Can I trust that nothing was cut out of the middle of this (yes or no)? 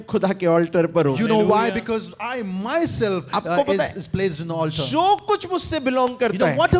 yes